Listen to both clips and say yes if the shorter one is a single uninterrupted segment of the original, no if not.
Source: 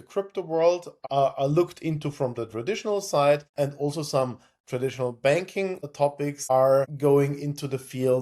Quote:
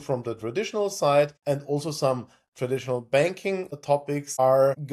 yes